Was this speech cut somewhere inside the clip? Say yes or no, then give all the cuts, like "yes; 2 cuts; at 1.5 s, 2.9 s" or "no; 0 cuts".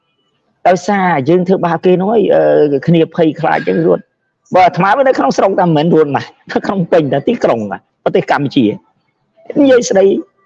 no; 0 cuts